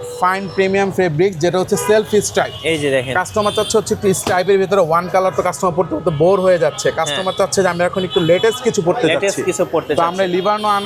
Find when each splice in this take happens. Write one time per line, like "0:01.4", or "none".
none